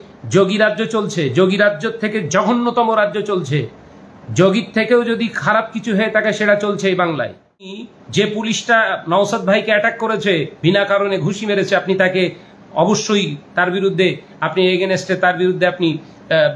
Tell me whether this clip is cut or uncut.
cut